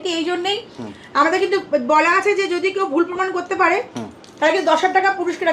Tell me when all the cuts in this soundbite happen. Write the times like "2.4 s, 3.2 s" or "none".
none